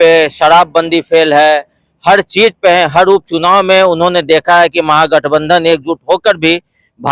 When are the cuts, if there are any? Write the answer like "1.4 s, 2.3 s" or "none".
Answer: none